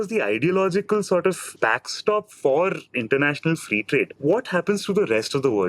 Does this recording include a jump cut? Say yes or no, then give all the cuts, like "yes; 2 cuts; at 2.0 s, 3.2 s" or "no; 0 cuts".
yes; 2 cuts; at 1.5 s, 4.1 s